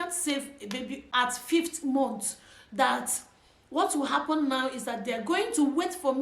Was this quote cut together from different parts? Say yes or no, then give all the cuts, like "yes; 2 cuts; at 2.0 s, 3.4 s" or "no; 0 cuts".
yes; 1 cut; at 1.0 s